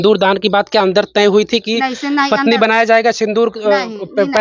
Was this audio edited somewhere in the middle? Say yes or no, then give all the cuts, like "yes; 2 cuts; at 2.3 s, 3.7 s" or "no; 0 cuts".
no; 0 cuts